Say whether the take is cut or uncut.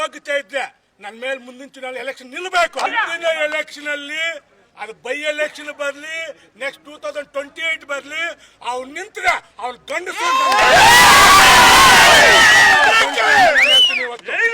cut